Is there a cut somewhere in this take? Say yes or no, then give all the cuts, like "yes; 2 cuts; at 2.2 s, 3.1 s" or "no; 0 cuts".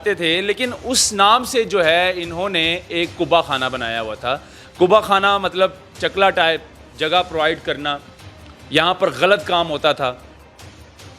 no; 0 cuts